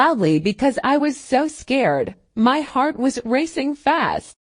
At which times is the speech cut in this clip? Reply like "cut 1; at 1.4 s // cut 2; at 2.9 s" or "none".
cut 1; at 2.2 s